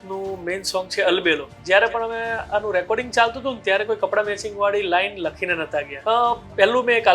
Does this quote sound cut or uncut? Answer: cut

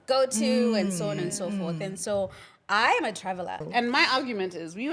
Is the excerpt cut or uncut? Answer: cut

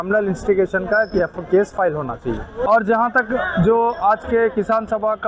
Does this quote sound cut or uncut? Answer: cut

